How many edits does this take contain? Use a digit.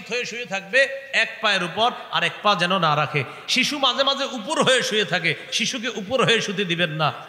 0